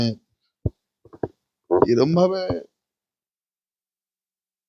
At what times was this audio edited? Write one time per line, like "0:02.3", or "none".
none